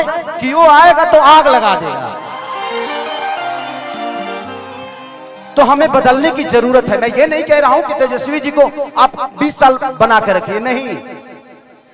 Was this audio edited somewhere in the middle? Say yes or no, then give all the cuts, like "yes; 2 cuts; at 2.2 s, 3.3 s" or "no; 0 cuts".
no; 0 cuts